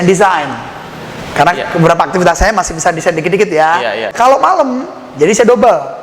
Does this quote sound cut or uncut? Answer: cut